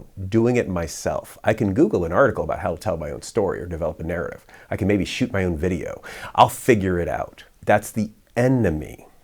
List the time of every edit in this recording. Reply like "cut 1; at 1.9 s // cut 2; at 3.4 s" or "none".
cut 1; at 7.5 s